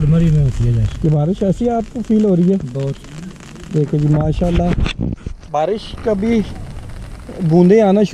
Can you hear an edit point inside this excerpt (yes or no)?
no